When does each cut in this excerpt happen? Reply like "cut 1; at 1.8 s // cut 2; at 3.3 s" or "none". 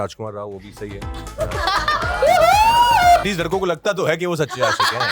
cut 1; at 3.2 s